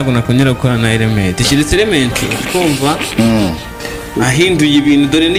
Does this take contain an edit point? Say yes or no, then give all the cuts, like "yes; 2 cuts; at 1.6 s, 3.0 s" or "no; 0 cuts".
no; 0 cuts